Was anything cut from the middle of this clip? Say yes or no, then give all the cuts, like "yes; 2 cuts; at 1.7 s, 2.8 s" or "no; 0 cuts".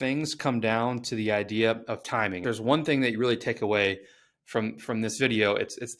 yes; 1 cut; at 2.4 s